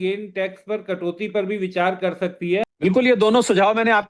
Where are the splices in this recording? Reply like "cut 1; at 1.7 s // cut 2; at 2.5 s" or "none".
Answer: cut 1; at 2.7 s